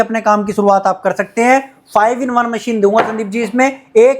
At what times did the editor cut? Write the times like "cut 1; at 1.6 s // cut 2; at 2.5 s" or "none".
none